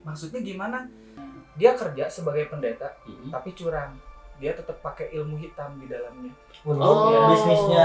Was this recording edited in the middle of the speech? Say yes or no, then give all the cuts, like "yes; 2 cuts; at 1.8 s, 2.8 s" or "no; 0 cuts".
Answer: yes; 1 cut; at 1.1 s